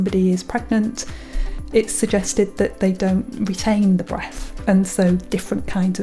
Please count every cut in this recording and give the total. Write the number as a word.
one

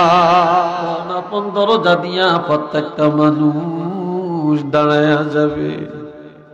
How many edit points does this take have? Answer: one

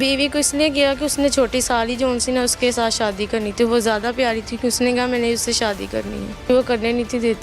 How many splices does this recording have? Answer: one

